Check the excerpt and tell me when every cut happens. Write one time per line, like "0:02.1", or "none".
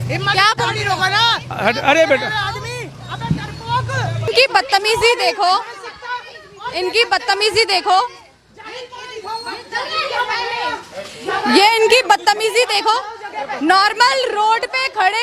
0:04.3